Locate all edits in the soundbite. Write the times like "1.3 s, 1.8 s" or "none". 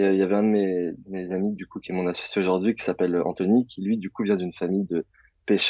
none